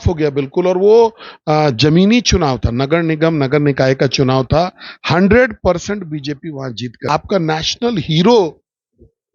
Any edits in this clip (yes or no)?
yes